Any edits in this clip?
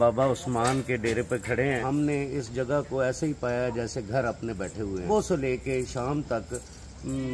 yes; 2 cuts; at 1.8 s, 5.1 s

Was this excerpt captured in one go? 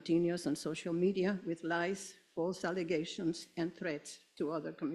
no; 1 cut; at 3.5 s

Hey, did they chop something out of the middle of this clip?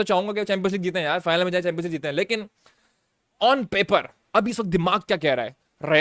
no; 0 cuts

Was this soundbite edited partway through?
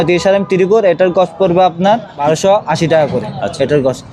yes; 1 cut; at 2.1 s

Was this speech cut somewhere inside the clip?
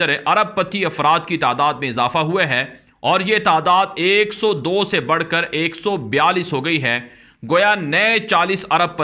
no; 0 cuts

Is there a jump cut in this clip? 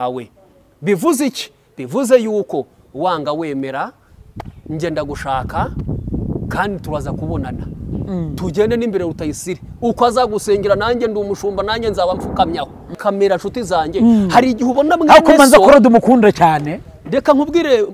yes; 1 cut; at 13.0 s

